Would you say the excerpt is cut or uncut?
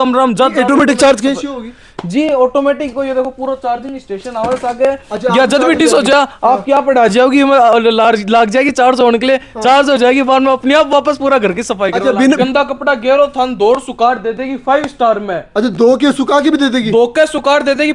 cut